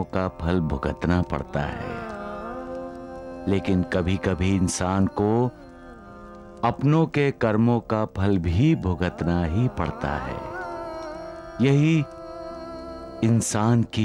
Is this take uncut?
yes; 0 cuts

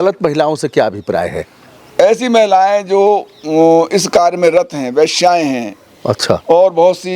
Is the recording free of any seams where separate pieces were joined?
yes; 0 cuts

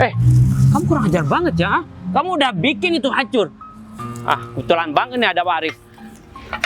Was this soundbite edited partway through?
no; 0 cuts

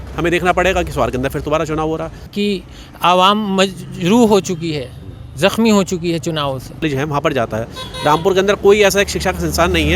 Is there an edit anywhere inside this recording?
yes; 2 cuts; at 2.3 s, 6.8 s

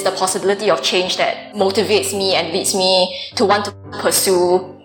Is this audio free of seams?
no; 1 cut; at 1.4 s

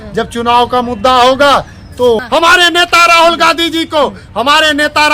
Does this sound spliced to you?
yes; 1 cut; at 2.2 s

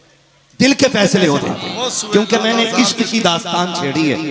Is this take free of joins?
no; 1 cut; at 1.4 s

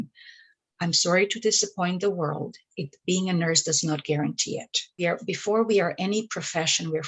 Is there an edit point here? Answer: yes; 1 cut; at 5.0 s

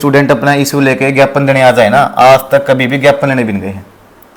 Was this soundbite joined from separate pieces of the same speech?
no; 0 cuts

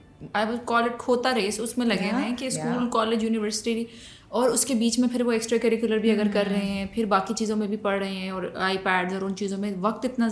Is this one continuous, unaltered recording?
yes; 0 cuts

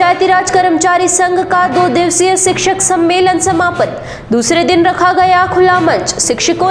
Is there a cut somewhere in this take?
no; 0 cuts

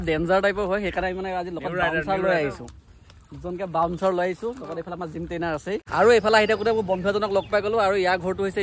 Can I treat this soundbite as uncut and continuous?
no; 1 cut; at 5.8 s

